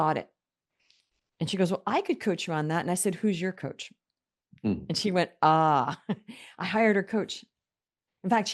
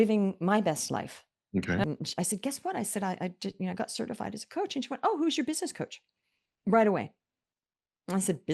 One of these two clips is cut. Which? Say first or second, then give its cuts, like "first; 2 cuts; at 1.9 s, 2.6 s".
second; 1 cut; at 1.8 s